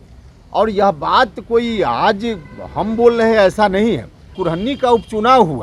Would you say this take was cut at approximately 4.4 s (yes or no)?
yes